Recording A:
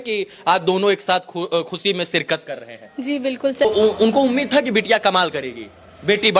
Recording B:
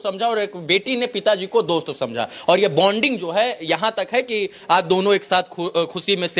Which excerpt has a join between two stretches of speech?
A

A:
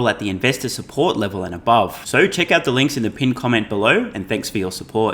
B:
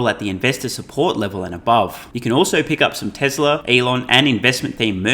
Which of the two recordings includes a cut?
B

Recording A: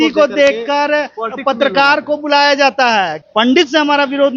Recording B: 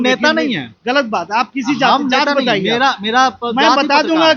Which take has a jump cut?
A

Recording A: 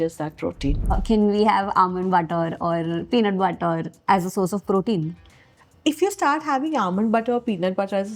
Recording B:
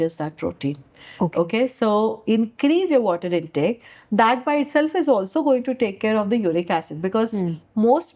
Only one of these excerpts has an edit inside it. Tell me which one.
A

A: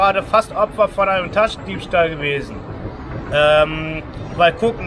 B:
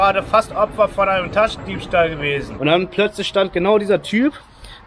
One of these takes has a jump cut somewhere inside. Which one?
B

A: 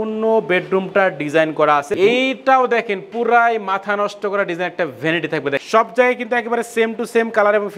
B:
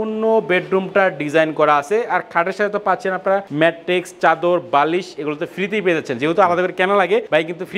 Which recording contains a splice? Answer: A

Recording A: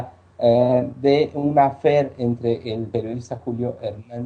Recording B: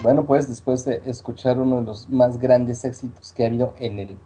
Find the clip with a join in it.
A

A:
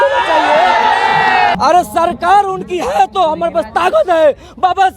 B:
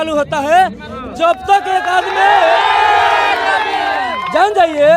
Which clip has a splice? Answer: A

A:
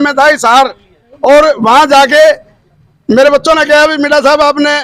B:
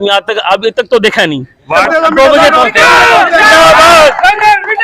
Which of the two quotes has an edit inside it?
B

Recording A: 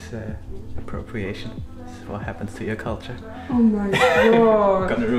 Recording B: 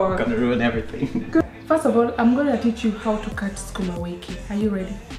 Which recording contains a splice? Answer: B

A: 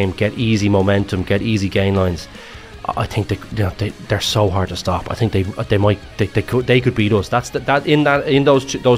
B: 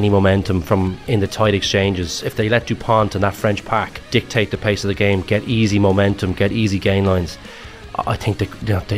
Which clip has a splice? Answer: B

